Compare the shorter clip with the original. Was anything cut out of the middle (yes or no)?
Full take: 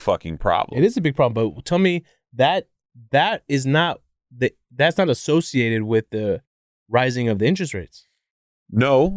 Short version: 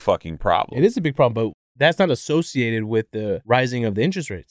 yes